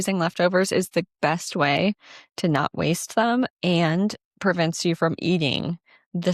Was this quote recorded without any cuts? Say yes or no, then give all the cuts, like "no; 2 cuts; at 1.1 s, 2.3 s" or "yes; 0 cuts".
yes; 0 cuts